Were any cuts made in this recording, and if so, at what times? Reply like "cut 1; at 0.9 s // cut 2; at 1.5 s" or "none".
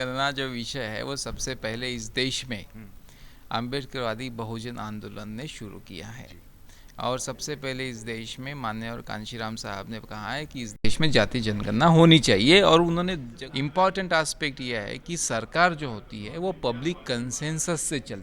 cut 1; at 13.2 s